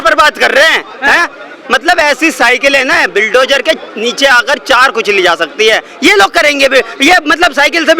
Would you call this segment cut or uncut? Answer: uncut